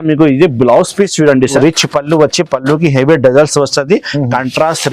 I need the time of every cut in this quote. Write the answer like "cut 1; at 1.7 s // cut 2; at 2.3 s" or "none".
cut 1; at 1.5 s